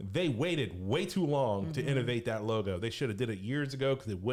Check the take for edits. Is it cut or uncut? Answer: uncut